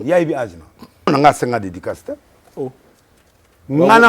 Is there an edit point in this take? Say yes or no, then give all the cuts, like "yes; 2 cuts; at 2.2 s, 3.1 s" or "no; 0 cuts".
yes; 1 cut; at 1.1 s